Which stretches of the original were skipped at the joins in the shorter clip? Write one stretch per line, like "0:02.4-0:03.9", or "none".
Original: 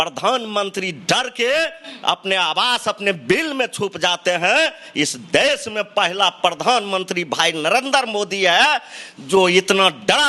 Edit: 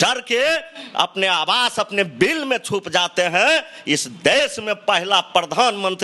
none